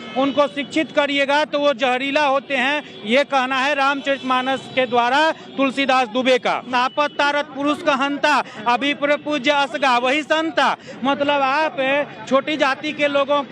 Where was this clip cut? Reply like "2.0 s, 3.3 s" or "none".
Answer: 6.7 s